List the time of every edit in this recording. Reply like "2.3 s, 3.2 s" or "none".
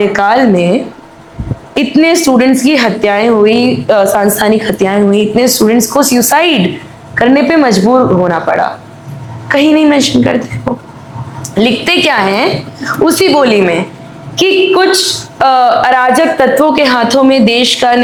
none